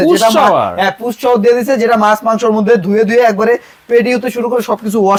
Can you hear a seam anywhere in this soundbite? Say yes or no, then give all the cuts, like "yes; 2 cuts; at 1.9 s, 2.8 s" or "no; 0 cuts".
no; 0 cuts